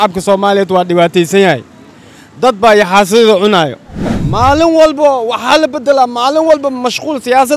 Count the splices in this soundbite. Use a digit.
1